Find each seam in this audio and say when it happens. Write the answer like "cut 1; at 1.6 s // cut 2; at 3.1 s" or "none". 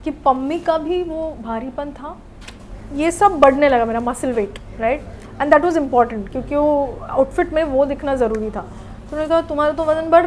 cut 1; at 2.6 s